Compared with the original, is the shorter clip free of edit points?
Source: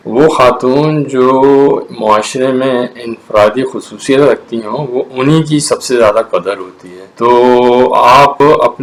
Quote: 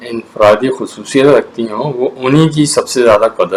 yes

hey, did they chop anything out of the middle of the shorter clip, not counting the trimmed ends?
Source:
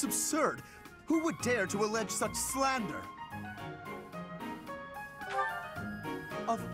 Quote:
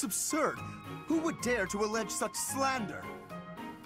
yes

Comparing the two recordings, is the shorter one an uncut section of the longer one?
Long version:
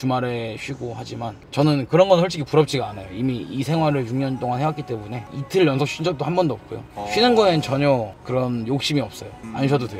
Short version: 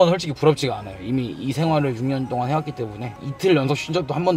yes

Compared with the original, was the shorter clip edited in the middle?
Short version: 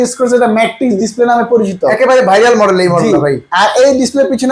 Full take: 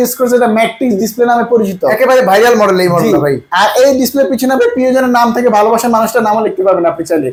no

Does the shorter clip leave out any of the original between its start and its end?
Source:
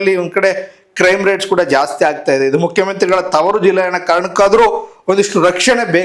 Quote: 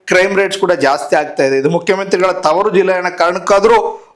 no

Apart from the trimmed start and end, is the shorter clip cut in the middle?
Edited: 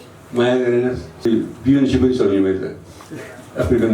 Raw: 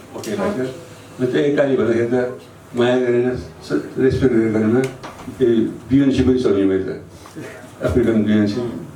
yes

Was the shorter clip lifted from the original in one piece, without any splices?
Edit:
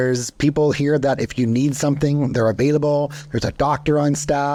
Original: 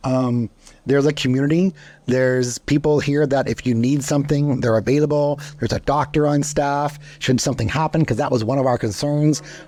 yes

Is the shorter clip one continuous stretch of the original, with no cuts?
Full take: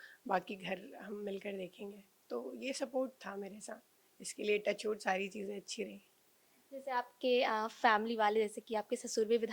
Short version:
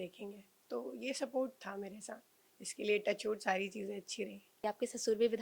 no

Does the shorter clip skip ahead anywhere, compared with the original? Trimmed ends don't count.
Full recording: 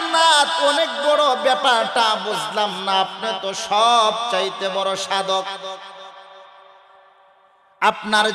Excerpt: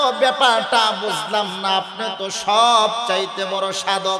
no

